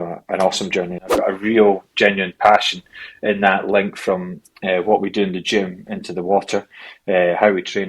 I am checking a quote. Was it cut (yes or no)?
yes